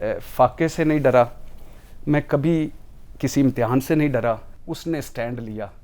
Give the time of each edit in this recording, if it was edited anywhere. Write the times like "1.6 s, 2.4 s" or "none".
4.5 s